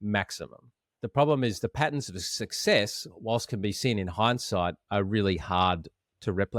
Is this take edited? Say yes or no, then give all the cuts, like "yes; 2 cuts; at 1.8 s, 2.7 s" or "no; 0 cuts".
no; 0 cuts